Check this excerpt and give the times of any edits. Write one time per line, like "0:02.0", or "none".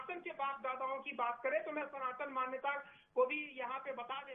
none